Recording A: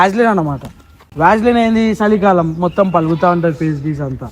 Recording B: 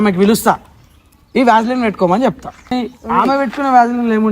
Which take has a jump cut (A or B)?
B